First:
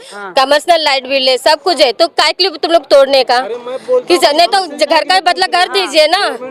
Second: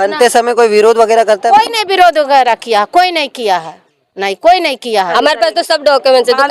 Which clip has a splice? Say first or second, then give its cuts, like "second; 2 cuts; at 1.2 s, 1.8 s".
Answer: second; 1 cut; at 5.1 s